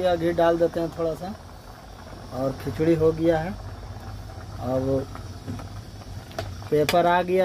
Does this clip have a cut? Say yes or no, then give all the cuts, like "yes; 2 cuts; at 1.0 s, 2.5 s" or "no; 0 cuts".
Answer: no; 0 cuts